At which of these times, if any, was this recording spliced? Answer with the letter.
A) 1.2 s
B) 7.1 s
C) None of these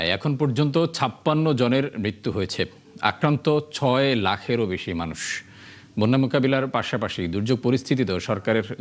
C